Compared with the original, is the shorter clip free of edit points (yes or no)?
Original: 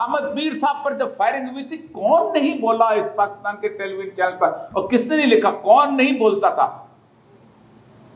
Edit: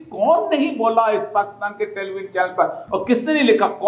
yes